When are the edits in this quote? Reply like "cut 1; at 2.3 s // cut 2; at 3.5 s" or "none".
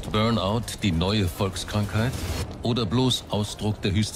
none